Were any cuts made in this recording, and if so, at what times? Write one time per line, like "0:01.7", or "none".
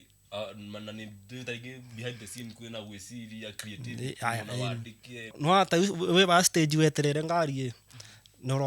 0:05.4